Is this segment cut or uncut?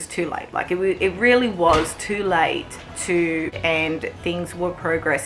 cut